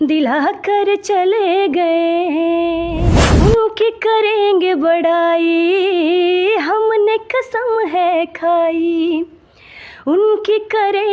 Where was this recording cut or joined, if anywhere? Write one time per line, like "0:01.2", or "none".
0:03.0